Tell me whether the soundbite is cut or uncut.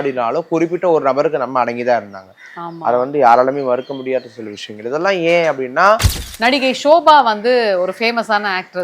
cut